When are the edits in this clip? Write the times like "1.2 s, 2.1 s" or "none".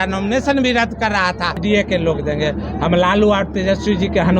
1.6 s